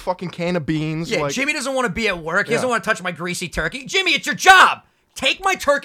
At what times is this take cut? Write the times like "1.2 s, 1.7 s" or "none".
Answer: none